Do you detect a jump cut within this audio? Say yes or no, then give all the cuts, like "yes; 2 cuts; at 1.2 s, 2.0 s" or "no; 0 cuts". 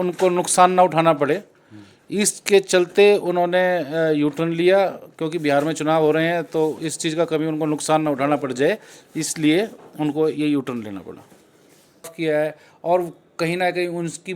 yes; 1 cut; at 12.1 s